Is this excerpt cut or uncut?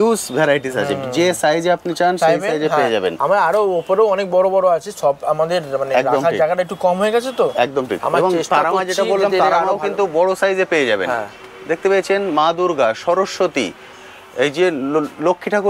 uncut